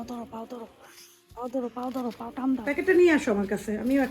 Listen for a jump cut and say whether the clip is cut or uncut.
cut